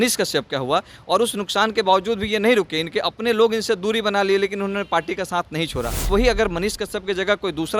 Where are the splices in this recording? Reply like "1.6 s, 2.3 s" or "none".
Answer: 6.1 s